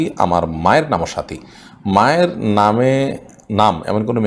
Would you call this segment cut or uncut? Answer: uncut